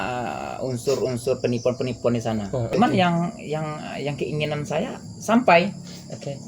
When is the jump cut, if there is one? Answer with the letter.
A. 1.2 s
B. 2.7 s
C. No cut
B